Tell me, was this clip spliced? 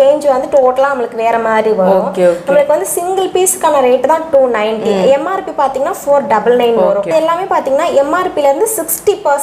yes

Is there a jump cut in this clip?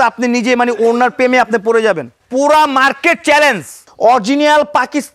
yes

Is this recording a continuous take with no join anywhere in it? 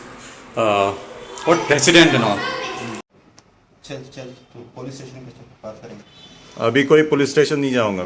no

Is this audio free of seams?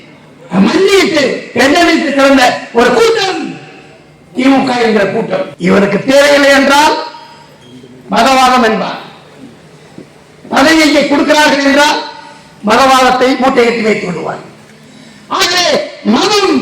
no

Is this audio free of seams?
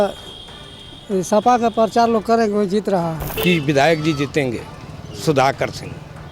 no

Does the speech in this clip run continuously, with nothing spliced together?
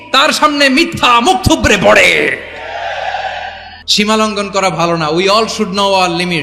no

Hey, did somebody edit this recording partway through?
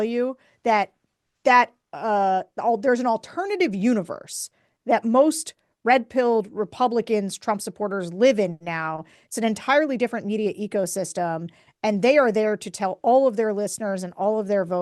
no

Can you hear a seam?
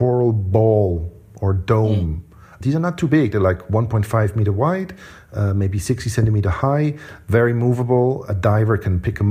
no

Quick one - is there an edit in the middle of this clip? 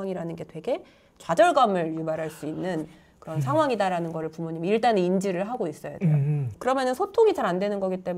yes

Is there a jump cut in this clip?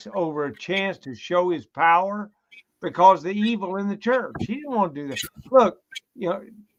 no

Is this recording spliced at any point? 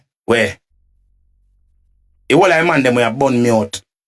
no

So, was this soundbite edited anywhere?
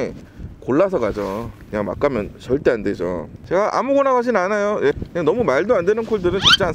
yes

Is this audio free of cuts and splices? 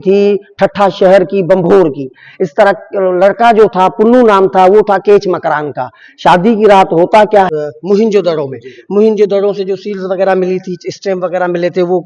no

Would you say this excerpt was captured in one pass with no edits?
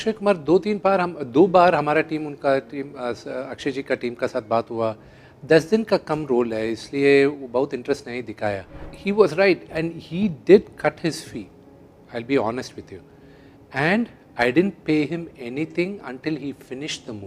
no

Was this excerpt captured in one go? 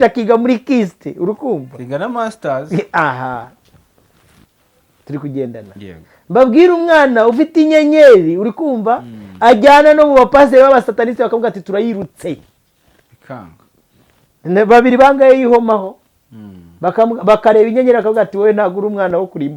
yes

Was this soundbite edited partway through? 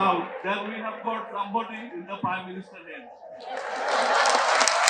no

